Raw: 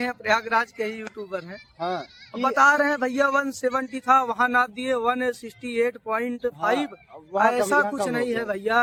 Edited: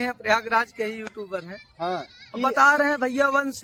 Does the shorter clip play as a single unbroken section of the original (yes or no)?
yes